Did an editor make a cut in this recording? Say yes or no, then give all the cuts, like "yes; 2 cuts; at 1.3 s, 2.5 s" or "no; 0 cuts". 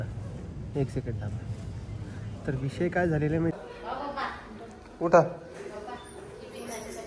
yes; 1 cut; at 3.6 s